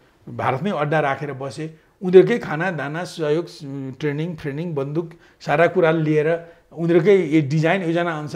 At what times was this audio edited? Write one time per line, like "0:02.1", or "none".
none